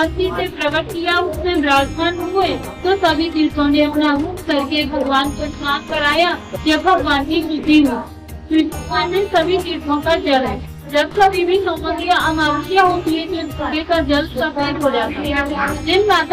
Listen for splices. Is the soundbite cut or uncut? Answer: uncut